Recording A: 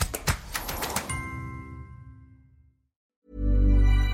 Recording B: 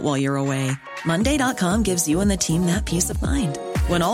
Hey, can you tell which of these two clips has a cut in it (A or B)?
A